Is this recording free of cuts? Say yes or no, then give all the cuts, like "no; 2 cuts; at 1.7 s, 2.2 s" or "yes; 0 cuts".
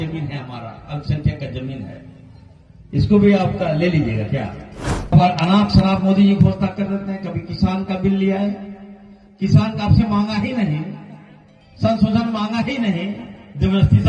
no; 1 cut; at 5.1 s